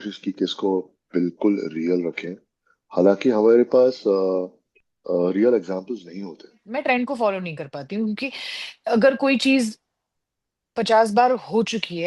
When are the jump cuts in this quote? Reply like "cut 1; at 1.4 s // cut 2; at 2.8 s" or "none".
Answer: cut 1; at 6.6 s